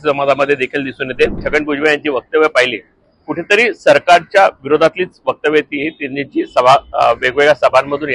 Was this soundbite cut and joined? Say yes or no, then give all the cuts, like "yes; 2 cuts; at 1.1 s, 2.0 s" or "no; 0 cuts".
yes; 1 cut; at 1.4 s